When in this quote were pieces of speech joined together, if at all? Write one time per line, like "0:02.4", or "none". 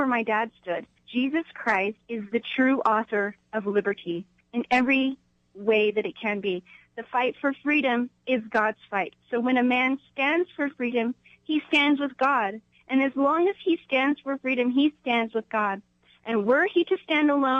0:01.0
0:02.0
0:04.3
0:06.8